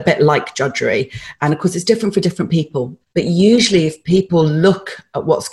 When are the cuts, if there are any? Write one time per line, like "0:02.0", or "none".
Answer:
0:01.2
0:03.0
0:04.3